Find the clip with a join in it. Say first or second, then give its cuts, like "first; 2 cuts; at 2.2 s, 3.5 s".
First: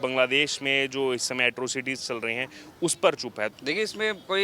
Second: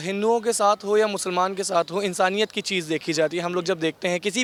first; 1 cut; at 3.5 s